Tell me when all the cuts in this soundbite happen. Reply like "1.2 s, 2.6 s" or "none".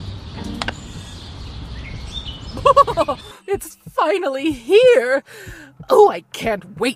2.5 s